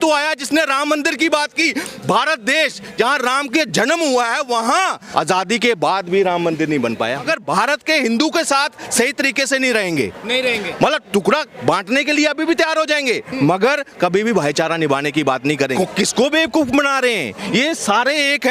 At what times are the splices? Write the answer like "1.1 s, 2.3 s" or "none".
5.0 s, 7.3 s, 15.7 s